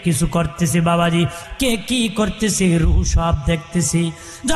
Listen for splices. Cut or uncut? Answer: cut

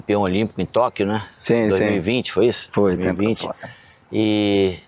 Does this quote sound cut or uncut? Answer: uncut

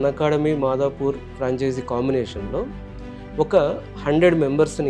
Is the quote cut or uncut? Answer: uncut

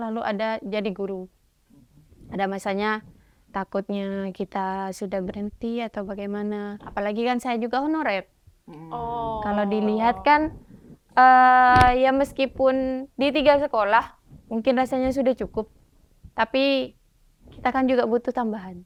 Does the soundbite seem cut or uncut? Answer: uncut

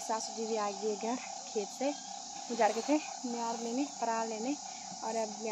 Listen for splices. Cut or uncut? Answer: uncut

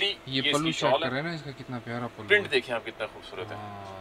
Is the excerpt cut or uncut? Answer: uncut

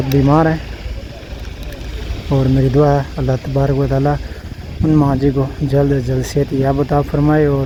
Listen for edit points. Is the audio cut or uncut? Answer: uncut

